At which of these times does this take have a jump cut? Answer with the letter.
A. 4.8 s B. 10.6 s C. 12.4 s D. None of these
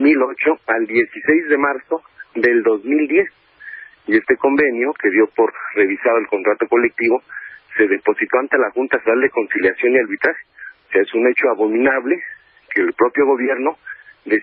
C